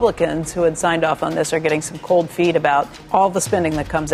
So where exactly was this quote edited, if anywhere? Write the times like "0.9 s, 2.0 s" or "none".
3.0 s